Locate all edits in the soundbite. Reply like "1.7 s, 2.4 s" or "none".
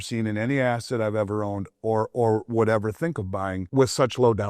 3.6 s